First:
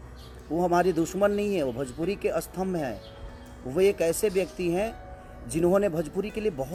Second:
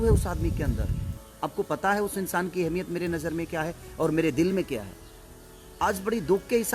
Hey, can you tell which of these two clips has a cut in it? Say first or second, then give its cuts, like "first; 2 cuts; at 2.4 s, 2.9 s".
second; 1 cut; at 1.2 s